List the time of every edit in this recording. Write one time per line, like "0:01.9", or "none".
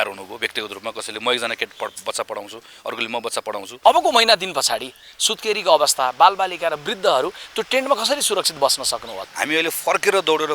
0:03.7
0:09.2